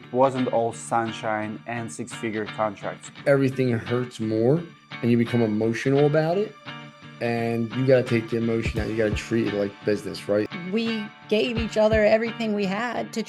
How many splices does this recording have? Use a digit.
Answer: 2